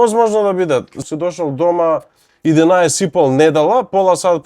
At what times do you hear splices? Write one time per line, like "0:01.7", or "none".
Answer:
0:01.0

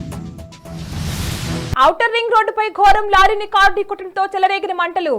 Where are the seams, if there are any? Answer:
0:01.8

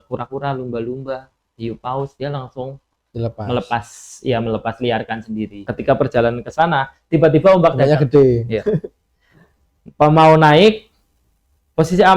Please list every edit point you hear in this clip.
0:05.6

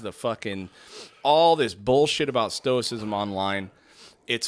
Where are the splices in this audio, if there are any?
none

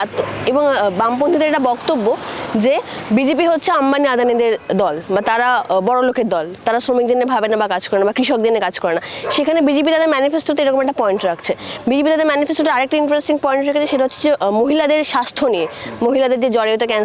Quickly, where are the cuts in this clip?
none

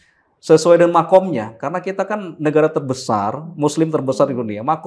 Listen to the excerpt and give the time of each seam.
none

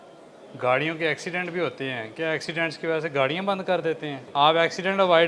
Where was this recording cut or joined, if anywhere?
0:04.2

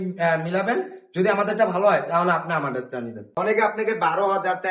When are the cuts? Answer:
0:03.2

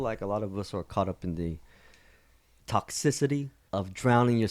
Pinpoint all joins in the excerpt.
0:02.6
0:03.6

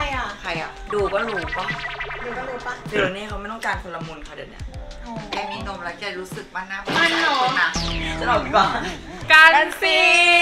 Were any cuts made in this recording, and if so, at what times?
0:09.2

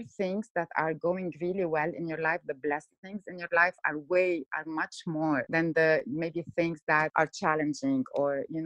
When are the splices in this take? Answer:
0:05.5
0:07.1

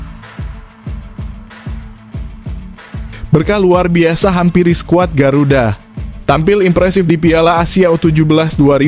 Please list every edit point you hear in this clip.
none

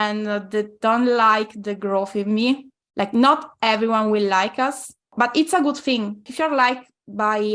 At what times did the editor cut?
0:02.8
0:05.1
0:06.3

